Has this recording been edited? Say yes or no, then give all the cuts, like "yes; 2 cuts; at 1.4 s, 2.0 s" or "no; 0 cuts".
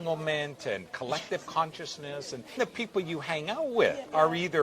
no; 0 cuts